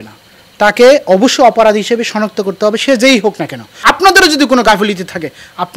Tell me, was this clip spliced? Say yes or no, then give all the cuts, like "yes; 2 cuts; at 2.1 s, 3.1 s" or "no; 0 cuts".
yes; 1 cut; at 3.7 s